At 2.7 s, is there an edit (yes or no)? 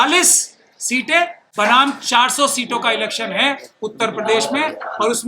no